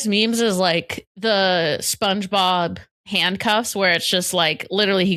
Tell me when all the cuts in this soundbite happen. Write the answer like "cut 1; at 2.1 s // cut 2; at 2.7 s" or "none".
none